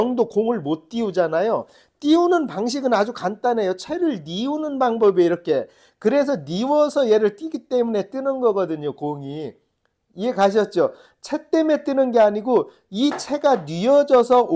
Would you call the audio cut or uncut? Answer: uncut